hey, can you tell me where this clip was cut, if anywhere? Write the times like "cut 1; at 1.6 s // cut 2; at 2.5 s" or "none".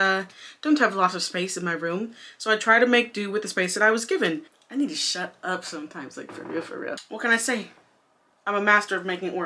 cut 1; at 4.4 s // cut 2; at 6.9 s